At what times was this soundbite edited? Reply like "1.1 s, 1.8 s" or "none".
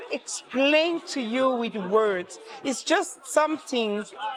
none